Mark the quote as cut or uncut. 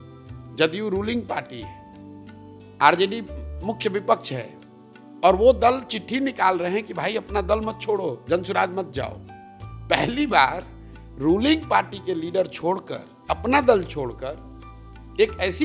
uncut